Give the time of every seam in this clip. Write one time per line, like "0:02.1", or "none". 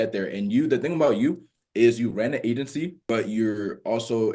0:03.0